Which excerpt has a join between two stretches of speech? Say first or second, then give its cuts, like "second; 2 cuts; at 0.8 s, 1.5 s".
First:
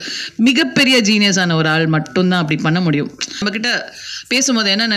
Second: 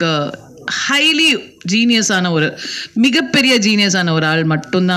first; 1 cut; at 3.3 s